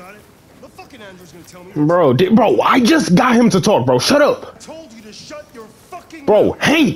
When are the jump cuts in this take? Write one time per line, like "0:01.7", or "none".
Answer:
0:04.6

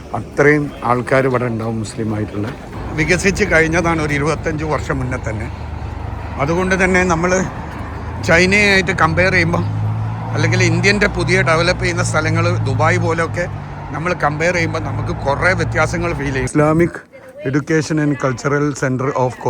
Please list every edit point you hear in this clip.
0:02.8
0:16.5

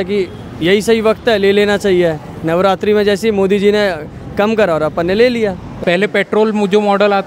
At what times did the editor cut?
0:05.7

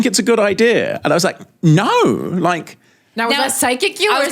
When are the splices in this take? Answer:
none

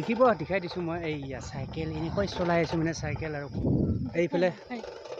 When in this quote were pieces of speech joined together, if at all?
0:03.5

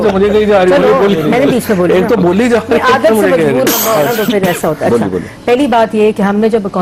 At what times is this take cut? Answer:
none

